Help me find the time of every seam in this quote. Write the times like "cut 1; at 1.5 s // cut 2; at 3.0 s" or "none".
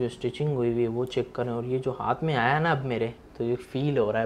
none